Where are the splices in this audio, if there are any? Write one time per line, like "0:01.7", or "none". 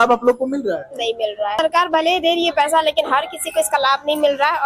0:01.6